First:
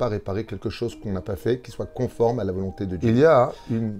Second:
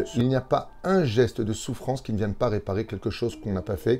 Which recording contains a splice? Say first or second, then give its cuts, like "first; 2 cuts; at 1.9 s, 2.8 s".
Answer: first; 1 cut; at 2.9 s